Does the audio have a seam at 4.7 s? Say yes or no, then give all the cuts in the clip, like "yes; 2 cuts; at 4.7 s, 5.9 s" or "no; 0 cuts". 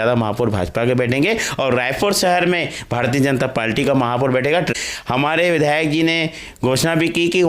yes; 1 cut; at 4.7 s